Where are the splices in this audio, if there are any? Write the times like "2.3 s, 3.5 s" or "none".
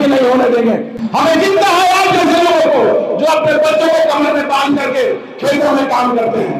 0.9 s